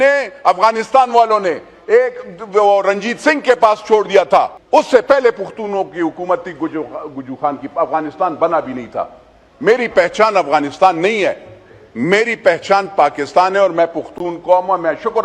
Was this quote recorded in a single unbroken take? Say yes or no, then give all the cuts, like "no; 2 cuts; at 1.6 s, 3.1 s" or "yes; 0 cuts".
no; 1 cut; at 4.6 s